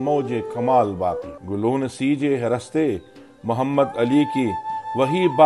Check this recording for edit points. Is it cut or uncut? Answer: cut